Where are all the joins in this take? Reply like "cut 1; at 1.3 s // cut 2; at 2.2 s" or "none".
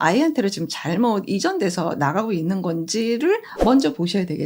cut 1; at 3.5 s